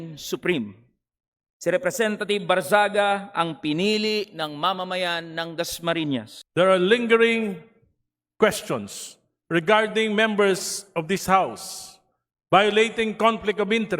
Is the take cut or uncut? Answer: cut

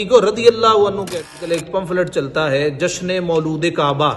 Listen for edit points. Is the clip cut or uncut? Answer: cut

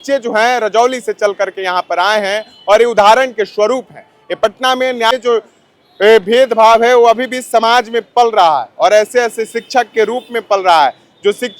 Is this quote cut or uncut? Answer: cut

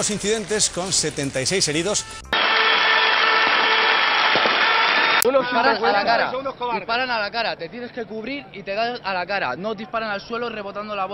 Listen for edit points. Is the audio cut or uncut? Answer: cut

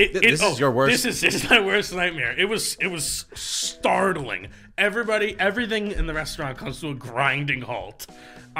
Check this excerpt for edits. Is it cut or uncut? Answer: uncut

